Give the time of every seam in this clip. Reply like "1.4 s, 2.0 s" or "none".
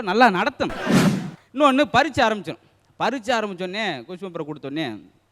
1.1 s